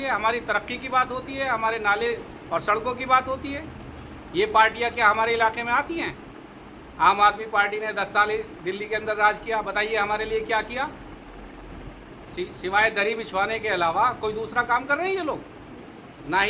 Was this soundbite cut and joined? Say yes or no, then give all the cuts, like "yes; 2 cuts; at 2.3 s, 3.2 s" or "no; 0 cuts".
no; 0 cuts